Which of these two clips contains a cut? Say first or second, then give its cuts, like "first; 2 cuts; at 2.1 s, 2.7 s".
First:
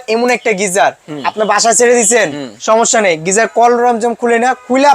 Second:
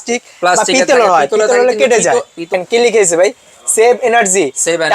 second; 1 cut; at 2.5 s